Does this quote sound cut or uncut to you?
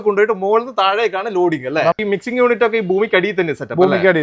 cut